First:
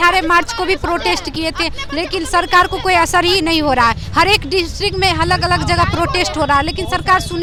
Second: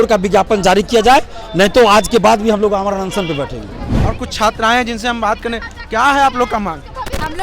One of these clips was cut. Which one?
second; 1 cut; at 3.8 s

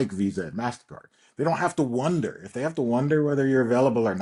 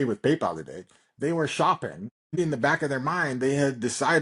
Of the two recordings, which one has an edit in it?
second; 1 cut; at 2.4 s

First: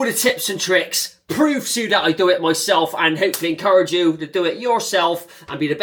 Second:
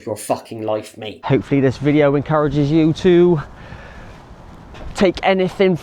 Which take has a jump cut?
second; 1 cut; at 1.2 s

